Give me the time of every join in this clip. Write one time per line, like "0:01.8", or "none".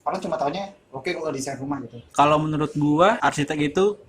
0:02.0
0:03.2